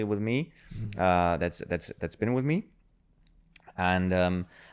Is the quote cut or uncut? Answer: uncut